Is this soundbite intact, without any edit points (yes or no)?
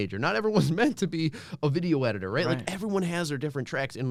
yes